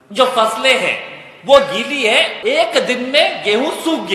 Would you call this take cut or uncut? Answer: cut